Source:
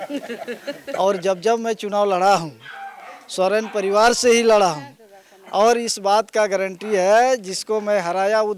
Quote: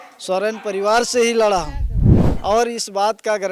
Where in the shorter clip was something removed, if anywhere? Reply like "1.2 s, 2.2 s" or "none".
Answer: none